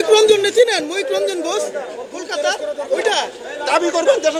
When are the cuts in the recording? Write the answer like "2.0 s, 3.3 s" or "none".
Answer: none